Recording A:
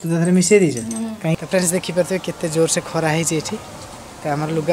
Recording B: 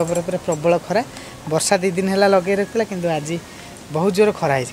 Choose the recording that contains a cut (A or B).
A